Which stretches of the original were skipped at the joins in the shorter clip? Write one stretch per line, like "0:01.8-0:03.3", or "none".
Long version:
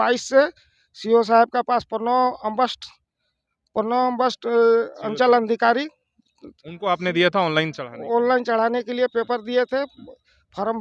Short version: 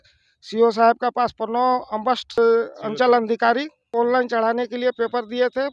0:02.9-0:04.6
0:06.0-0:07.9